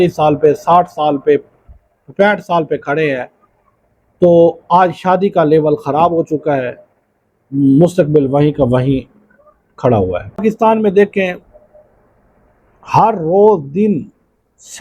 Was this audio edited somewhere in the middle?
yes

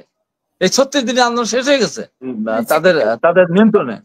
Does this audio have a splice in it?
yes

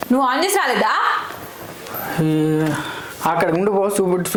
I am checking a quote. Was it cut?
no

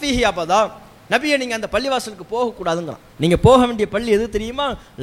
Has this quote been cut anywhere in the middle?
yes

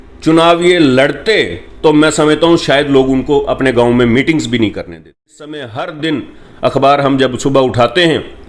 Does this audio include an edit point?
yes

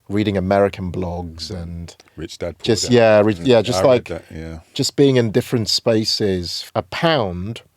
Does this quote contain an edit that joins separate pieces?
yes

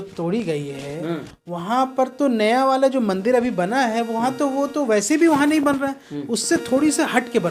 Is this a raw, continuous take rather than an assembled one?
yes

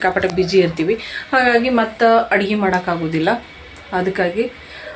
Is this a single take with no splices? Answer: yes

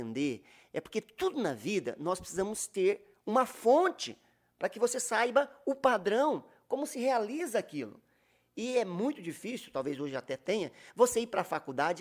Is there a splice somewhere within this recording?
no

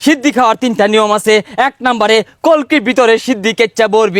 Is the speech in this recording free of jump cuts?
yes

